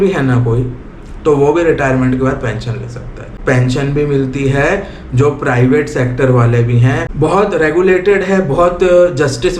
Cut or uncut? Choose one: cut